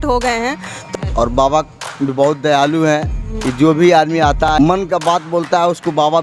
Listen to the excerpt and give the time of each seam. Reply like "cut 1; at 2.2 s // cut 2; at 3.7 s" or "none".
cut 1; at 0.8 s // cut 2; at 4.5 s